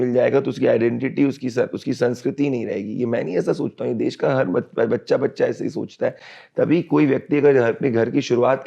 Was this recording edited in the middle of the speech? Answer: no; 0 cuts

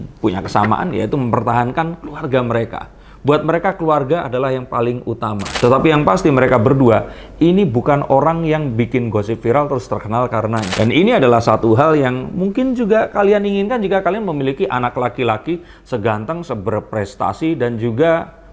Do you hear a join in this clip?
yes; 2 cuts; at 5.5 s, 10.7 s

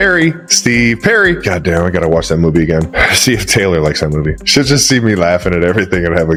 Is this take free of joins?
yes; 0 cuts

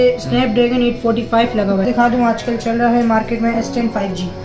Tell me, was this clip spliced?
yes; 1 cut; at 1.9 s

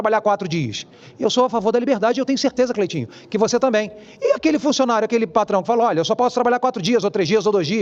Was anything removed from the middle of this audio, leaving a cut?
no; 0 cuts

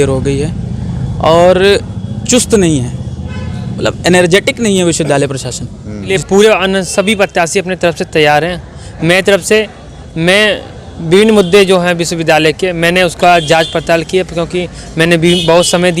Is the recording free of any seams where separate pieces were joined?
no; 1 cut; at 6.2 s

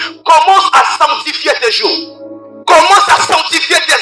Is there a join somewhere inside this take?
no; 0 cuts

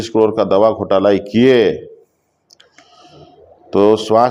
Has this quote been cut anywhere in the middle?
no; 0 cuts

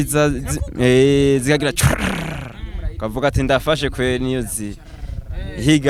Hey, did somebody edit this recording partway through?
no; 0 cuts

